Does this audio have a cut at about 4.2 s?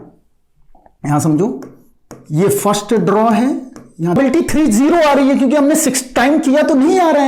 yes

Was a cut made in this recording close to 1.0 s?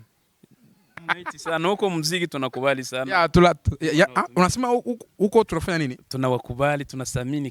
yes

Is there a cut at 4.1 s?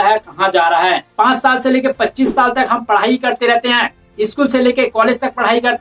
no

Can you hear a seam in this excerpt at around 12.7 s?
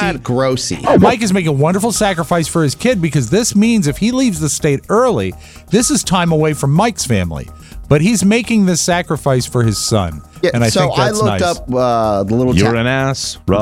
no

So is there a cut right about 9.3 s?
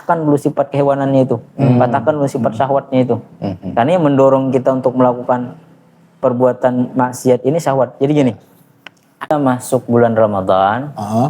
yes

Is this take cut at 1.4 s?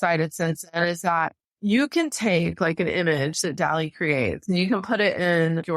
yes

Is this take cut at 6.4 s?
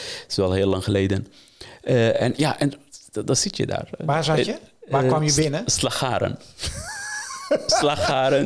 no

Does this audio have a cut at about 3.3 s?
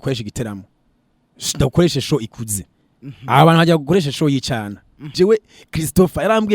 no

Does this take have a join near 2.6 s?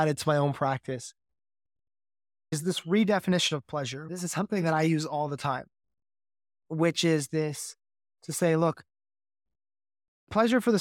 yes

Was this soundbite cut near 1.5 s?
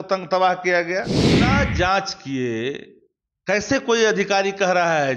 yes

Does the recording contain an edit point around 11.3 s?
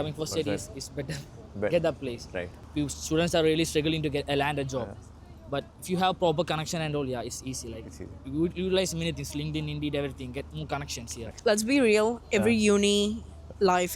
yes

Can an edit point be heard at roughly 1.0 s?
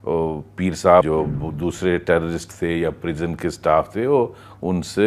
yes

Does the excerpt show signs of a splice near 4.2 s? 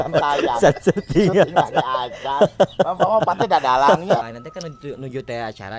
yes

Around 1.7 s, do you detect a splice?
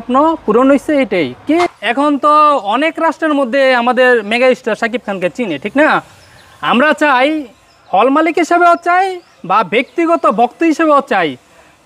yes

